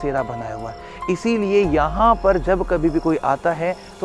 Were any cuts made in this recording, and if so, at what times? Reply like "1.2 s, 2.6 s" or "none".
none